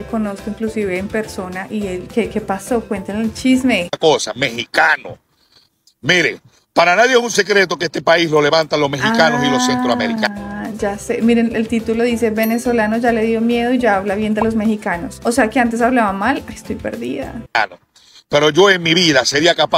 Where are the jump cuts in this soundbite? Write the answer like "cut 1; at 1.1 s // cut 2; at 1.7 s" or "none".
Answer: none